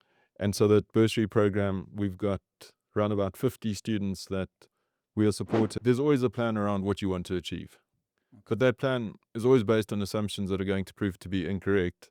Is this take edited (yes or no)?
yes